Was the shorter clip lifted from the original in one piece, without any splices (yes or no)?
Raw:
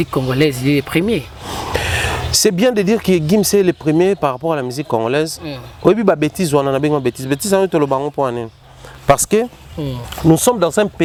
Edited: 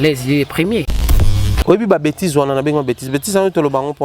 no